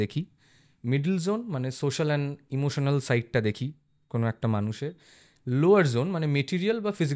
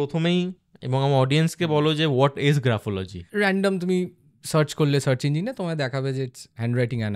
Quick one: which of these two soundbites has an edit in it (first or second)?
second